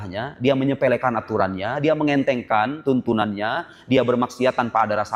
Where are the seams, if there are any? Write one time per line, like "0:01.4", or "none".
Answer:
none